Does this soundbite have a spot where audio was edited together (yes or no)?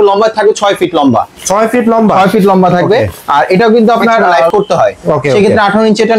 yes